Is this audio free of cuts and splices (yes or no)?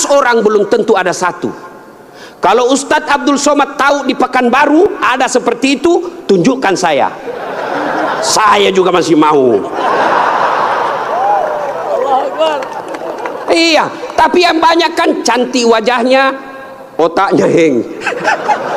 yes